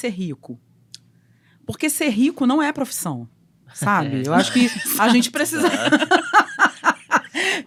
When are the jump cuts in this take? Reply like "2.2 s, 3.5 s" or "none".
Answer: none